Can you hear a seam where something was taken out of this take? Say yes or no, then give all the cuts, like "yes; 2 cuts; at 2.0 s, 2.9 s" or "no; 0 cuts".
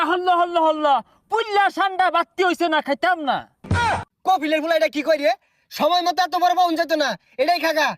yes; 1 cut; at 3.8 s